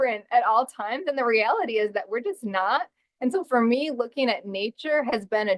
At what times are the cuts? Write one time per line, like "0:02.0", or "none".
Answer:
none

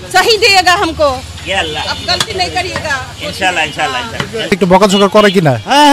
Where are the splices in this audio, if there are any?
0:04.5

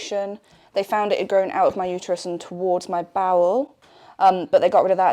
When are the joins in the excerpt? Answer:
none

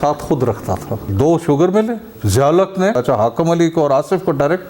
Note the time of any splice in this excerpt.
0:01.1
0:02.2
0:03.0

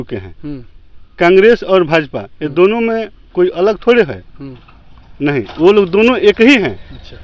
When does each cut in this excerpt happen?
none

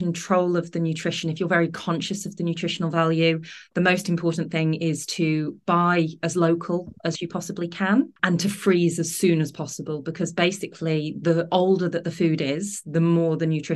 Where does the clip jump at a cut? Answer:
0:08.2

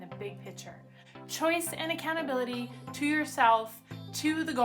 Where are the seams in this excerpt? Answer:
0:01.0

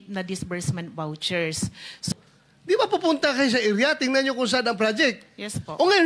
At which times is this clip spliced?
0:02.1

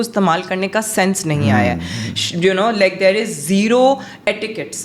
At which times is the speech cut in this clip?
none

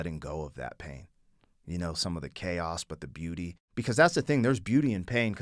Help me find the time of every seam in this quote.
0:03.6

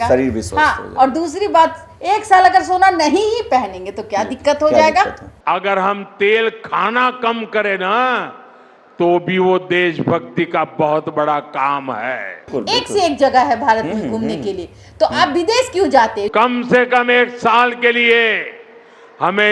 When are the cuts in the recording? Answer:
0:05.2
0:12.5
0:16.3

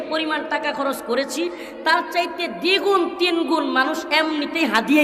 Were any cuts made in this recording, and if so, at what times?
none

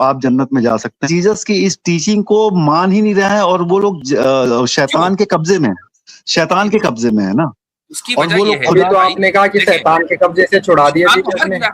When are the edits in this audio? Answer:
0:01.0

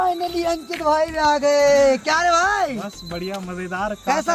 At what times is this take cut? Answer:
none

